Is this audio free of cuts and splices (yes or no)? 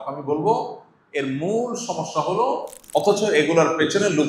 no